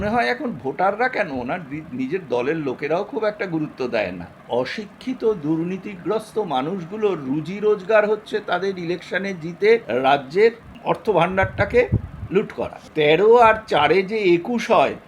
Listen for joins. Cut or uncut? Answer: cut